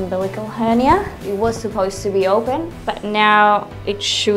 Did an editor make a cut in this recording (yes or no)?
yes